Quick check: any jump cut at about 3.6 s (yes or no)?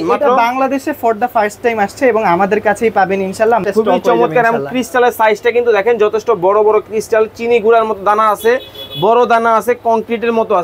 yes